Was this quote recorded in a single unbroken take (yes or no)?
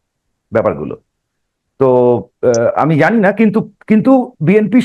yes